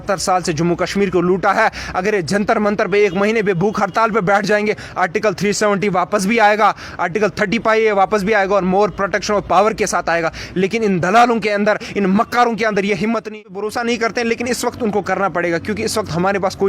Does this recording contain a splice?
yes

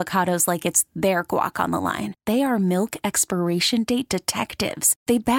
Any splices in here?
no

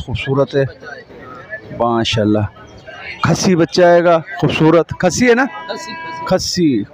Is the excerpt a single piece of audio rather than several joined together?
yes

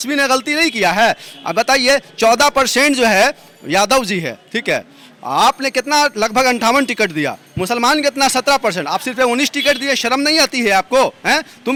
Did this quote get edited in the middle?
no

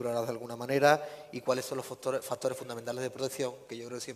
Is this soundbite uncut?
no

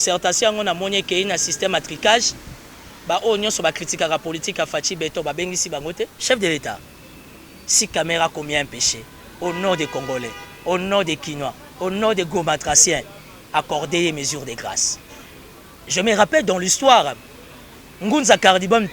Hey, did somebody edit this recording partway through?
yes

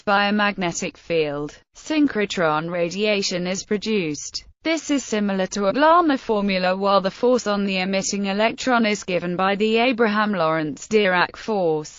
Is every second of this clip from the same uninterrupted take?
yes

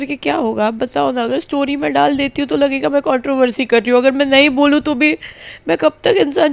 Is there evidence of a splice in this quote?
no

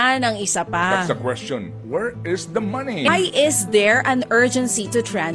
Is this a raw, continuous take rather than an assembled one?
no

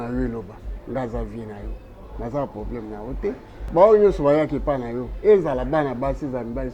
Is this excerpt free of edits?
no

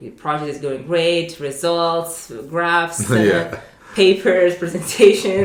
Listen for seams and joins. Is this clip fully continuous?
yes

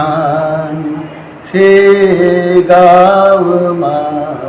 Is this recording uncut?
yes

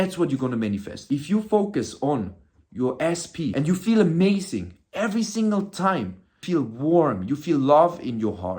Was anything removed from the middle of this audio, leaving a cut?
yes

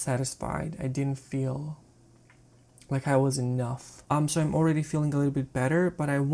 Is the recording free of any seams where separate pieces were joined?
no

